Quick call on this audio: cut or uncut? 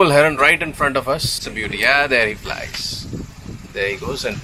uncut